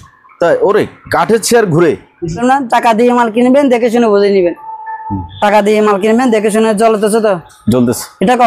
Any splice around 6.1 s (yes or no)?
no